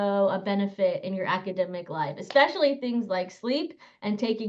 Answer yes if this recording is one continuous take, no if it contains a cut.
yes